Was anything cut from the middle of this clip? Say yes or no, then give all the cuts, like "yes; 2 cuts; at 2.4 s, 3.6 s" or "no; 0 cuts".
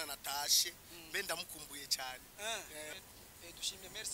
yes; 1 cut; at 2.9 s